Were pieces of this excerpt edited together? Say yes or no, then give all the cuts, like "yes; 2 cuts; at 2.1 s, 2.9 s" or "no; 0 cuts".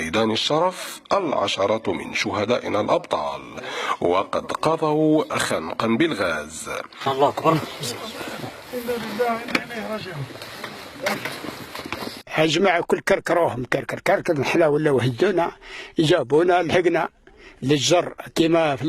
yes; 1 cut; at 17.2 s